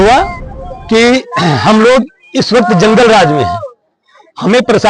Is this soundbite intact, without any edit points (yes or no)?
yes